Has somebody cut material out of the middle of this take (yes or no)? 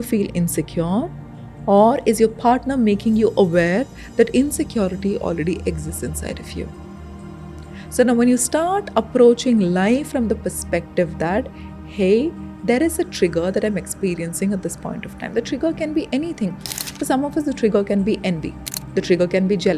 no